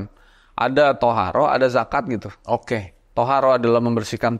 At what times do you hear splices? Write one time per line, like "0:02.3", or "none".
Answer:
0:03.0